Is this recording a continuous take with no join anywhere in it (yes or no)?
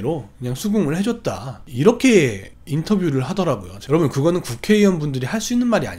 no